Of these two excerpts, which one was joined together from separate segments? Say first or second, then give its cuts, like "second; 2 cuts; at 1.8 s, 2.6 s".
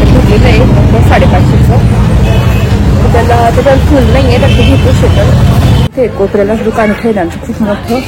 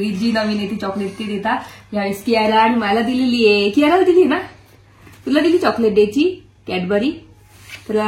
first; 1 cut; at 5.9 s